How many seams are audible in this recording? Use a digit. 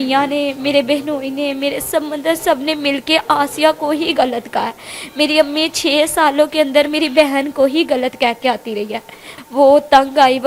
1